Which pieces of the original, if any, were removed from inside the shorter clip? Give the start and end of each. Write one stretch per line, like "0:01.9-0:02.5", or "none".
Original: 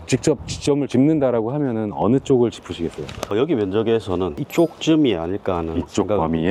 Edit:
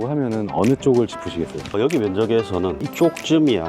0:03.0-0:03.1